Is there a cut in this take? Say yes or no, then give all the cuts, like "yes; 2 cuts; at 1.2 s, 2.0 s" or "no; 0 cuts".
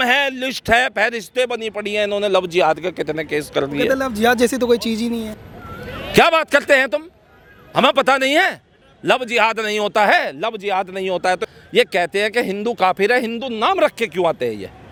no; 0 cuts